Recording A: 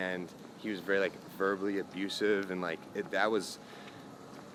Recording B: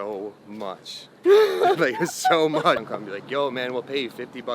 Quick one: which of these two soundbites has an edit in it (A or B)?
B